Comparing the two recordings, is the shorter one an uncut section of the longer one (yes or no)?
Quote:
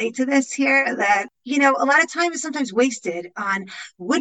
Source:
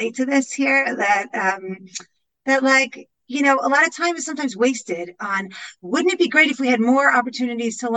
no